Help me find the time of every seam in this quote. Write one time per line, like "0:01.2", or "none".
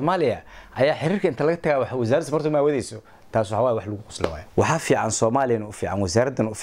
0:04.4